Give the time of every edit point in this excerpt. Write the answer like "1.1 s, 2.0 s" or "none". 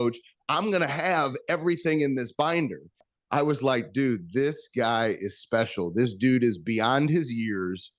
3.1 s